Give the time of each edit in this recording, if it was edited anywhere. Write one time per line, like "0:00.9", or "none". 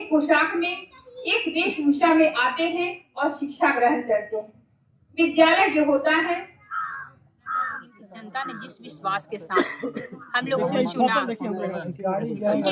0:08.3